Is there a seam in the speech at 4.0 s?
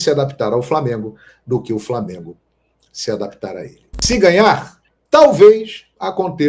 yes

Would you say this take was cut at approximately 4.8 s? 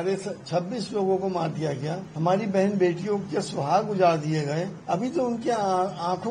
yes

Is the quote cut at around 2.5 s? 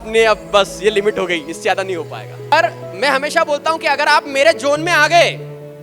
yes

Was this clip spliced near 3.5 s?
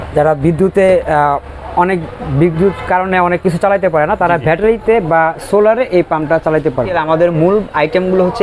no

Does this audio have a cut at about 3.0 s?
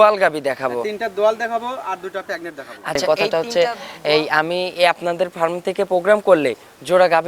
yes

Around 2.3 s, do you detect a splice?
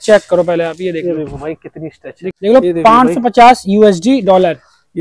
yes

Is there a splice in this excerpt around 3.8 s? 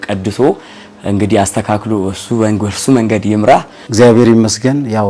yes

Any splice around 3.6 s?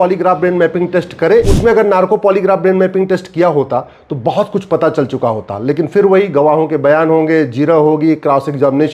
no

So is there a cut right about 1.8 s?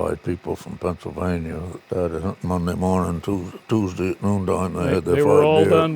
yes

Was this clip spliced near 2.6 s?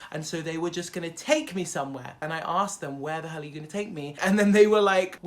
no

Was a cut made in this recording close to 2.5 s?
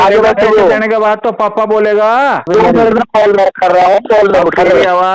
yes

